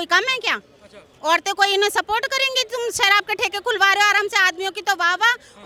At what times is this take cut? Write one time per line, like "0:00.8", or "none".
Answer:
none